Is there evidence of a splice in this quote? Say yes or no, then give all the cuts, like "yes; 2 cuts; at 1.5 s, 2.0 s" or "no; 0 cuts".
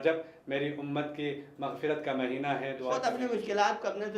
yes; 1 cut; at 2.9 s